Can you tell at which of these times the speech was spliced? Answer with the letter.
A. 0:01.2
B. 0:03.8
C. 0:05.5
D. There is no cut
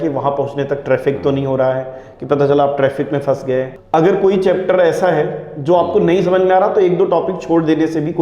B